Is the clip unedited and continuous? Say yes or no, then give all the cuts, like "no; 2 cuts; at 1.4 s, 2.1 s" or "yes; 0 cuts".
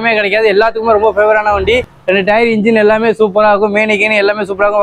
no; 1 cut; at 1.9 s